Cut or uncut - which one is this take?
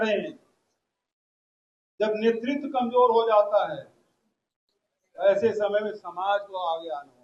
uncut